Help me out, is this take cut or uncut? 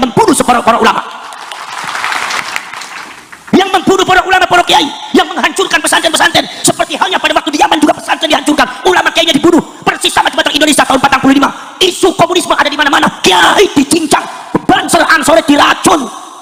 uncut